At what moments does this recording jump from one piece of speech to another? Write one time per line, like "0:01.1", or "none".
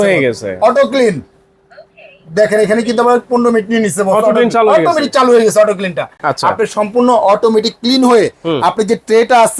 none